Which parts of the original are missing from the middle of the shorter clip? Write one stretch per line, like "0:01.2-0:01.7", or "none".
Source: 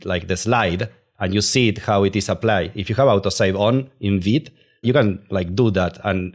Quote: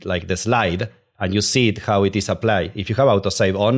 none